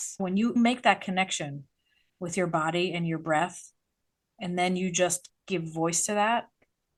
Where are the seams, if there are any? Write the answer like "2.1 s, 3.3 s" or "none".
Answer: none